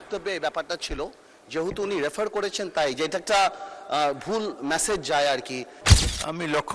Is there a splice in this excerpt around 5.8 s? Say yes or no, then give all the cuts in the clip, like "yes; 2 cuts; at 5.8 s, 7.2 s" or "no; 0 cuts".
yes; 1 cut; at 5.8 s